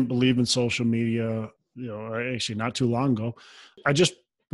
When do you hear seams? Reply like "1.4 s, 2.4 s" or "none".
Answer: 1.6 s, 3.8 s